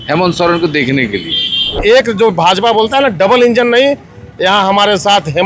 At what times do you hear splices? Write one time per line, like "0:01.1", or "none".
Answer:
0:01.7